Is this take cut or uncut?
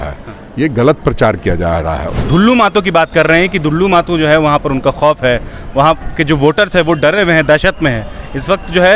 cut